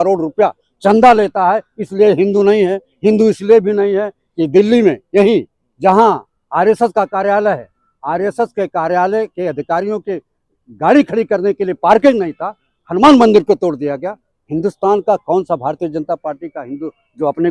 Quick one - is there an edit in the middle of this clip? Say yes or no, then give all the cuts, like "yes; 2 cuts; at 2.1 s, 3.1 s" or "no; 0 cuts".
no; 0 cuts